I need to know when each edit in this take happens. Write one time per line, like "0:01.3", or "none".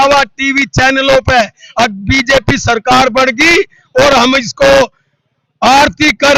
none